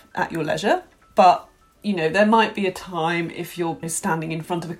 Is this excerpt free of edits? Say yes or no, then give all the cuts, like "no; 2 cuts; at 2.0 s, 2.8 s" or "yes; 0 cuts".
no; 1 cut; at 3.9 s